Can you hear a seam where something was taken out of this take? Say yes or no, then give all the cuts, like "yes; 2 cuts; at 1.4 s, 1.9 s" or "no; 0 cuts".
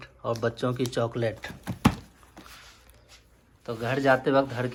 no; 0 cuts